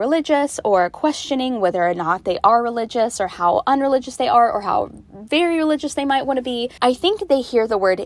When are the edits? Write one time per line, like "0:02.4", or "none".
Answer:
none

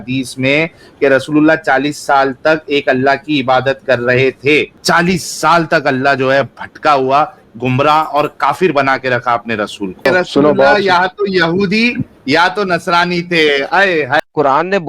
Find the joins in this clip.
0:04.7
0:10.1
0:14.2

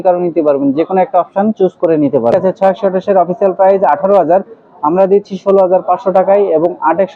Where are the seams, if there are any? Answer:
0:02.3

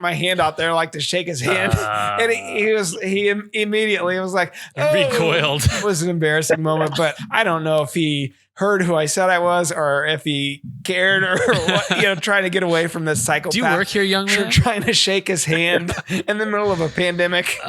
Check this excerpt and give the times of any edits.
0:05.8
0:07.2

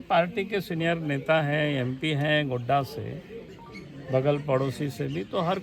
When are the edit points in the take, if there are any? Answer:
none

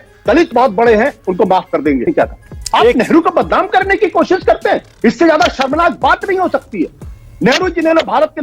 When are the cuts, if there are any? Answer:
0:02.1

